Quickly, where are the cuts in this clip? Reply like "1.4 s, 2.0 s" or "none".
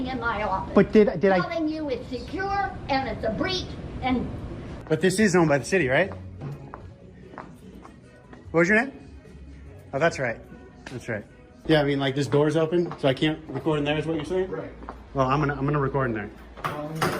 4.6 s, 11.4 s